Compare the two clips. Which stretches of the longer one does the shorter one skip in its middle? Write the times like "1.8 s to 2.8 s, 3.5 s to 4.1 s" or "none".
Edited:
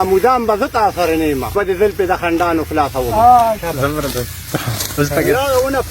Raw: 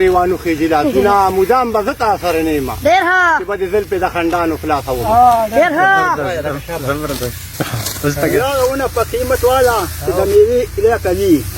2.8 s to 3.4 s, 5.5 s to 6.6 s